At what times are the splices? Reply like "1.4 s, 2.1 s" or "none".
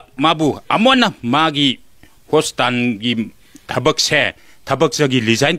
none